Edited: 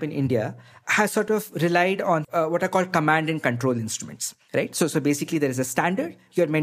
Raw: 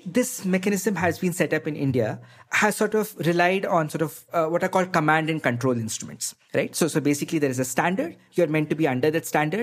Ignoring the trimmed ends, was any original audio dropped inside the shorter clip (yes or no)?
yes